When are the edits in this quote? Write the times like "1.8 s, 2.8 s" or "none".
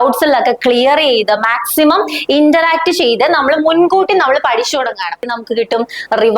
5.4 s